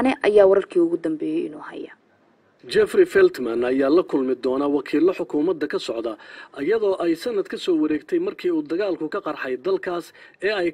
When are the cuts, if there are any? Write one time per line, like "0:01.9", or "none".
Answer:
none